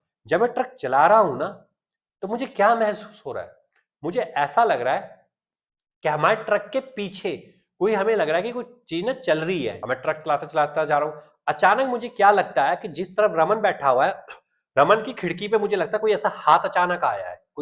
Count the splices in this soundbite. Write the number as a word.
one